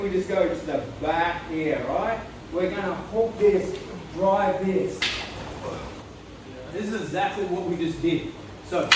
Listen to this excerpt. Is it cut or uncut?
cut